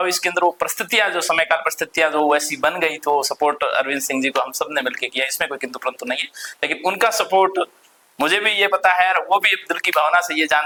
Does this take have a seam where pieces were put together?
no; 0 cuts

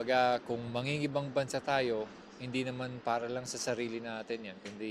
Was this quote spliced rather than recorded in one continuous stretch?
no; 0 cuts

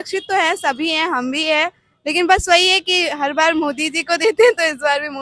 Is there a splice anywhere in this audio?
no; 0 cuts

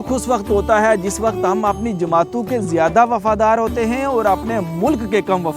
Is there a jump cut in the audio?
no; 0 cuts

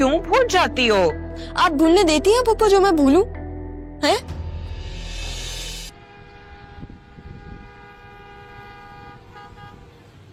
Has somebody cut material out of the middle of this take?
no; 0 cuts

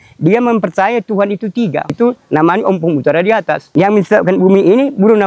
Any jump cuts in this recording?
yes; 2 cuts; at 1.9 s, 3.6 s

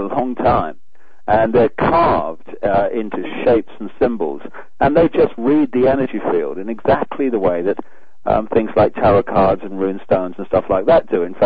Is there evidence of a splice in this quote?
no; 0 cuts

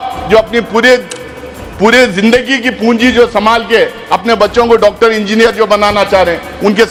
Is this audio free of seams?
yes; 0 cuts

